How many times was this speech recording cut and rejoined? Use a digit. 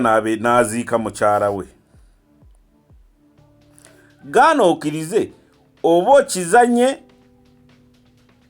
2